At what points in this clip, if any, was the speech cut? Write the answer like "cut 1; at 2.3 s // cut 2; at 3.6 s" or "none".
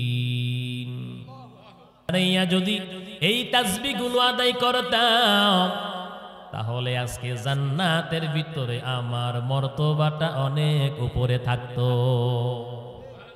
cut 1; at 2.1 s